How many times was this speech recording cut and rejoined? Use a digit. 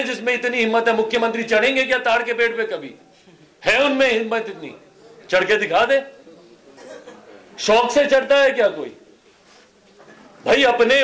0